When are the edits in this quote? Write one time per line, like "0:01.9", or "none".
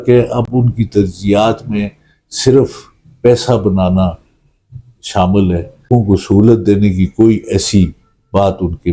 0:05.9